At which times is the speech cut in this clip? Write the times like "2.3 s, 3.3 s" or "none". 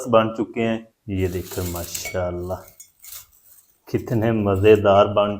1.0 s